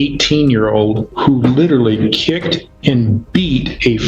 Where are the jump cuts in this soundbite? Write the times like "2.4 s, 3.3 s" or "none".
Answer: 1.1 s